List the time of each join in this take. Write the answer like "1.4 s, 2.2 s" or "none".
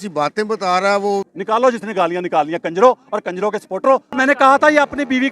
1.3 s, 4.2 s